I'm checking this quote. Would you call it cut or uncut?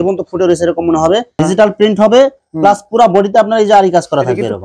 cut